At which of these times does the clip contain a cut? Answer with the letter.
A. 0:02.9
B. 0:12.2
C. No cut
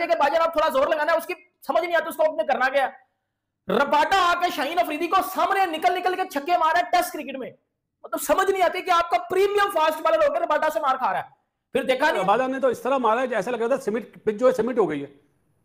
B